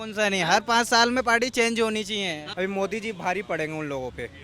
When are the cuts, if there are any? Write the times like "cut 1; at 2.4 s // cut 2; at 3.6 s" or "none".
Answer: cut 1; at 2.4 s